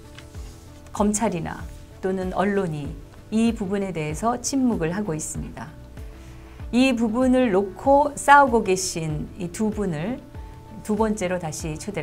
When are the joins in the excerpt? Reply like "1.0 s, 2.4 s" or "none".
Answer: 3.1 s